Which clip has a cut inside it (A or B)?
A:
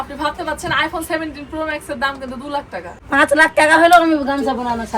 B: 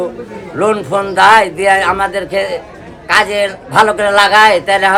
A